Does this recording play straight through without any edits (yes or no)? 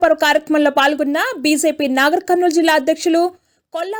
yes